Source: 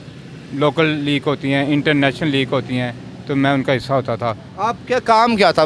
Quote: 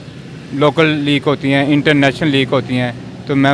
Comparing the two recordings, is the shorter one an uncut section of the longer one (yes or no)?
yes